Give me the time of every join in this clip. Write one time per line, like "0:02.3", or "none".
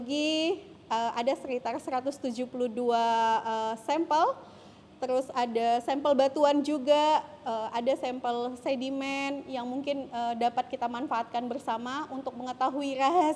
none